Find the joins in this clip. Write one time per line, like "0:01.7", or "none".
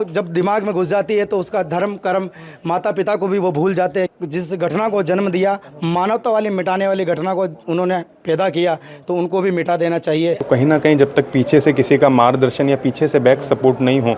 0:04.1
0:10.4